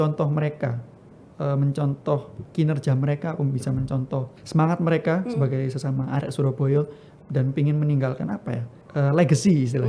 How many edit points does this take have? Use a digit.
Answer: 3